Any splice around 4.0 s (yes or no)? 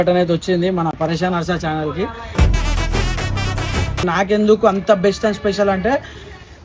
yes